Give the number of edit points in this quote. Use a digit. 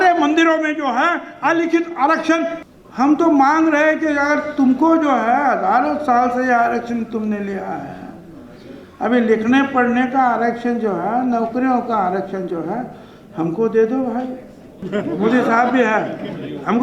2